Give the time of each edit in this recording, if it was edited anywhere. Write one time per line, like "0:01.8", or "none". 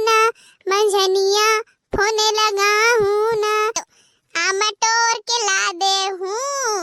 0:03.9